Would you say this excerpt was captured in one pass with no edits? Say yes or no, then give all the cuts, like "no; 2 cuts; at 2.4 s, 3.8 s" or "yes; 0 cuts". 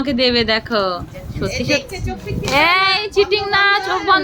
yes; 0 cuts